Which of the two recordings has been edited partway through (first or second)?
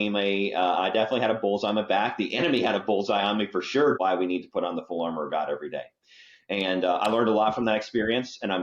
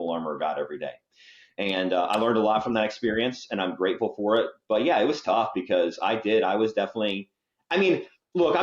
first